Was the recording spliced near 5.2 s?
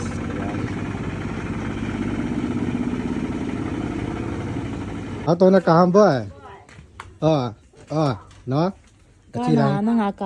yes; 1 cut; at 5.2 s

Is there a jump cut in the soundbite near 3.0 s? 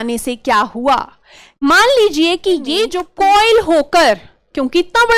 yes; 1 cut; at 3.0 s

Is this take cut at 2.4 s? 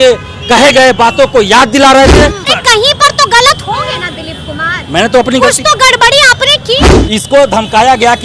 yes; 2 cuts; at 2.4 s, 6.9 s

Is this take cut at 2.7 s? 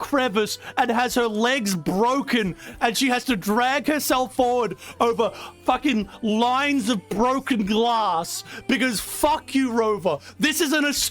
no; 0 cuts

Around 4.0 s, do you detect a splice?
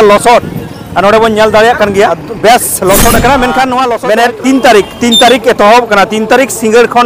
yes; 2 cuts; at 2.2 s, 4.0 s

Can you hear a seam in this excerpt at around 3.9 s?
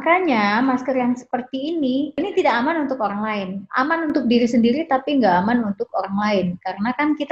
no; 1 cut; at 2.2 s

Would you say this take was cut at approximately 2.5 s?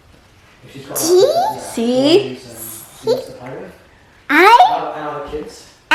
no; 0 cuts

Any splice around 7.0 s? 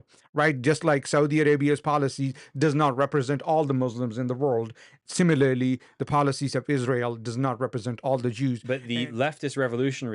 no; 1 cut; at 8.6 s

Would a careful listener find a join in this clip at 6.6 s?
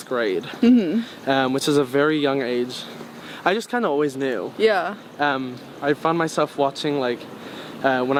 no; 0 cuts

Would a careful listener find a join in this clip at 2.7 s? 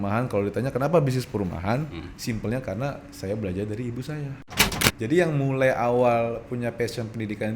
no; 1 cut; at 4.6 s

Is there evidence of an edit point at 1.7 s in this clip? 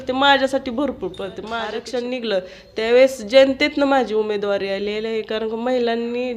yes; 1 cut; at 1.7 s

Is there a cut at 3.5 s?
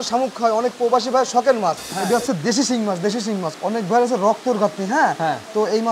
yes; 2 cuts; at 2.0 s, 3.5 s

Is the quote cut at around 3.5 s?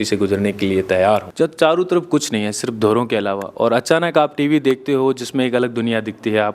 no; 1 cut; at 1.3 s

